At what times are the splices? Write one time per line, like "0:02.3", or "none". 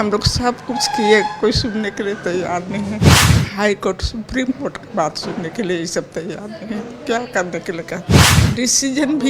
0:08.3